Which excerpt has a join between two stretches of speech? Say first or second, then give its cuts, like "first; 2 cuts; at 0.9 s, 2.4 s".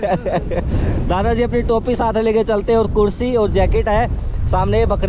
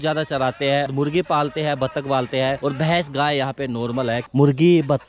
second; 3 cuts; at 0.9 s, 2.6 s, 4.2 s